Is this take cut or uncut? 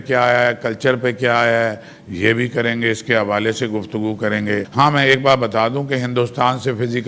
cut